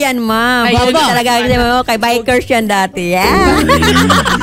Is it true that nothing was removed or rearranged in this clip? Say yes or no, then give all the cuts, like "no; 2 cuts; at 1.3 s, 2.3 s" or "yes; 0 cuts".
yes; 0 cuts